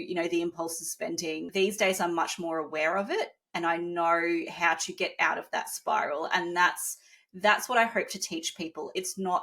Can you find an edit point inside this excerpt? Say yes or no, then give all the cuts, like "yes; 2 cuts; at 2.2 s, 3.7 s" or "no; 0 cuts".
yes; 1 cut; at 1.4 s